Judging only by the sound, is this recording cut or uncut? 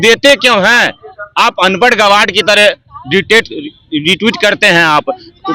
uncut